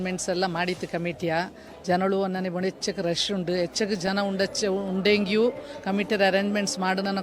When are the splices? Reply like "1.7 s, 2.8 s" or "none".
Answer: none